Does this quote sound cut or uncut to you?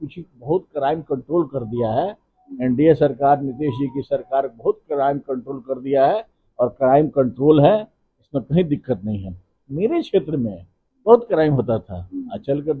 uncut